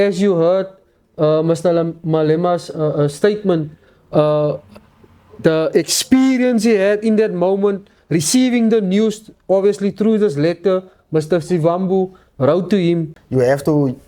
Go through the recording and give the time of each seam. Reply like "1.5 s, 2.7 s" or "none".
13.2 s